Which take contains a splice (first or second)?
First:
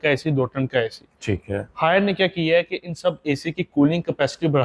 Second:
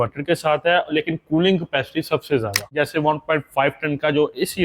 second